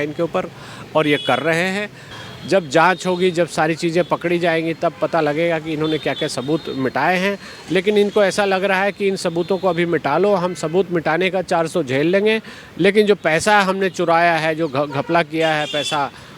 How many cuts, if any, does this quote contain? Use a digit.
1